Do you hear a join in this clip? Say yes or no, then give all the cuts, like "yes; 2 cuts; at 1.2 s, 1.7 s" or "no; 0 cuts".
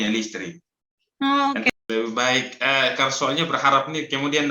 yes; 1 cut; at 1.7 s